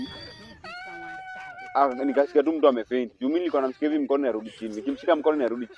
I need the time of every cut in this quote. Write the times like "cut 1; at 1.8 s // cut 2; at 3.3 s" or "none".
none